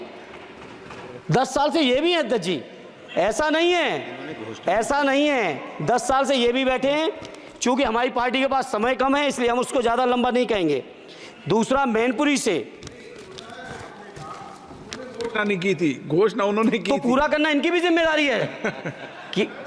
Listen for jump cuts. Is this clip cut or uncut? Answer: uncut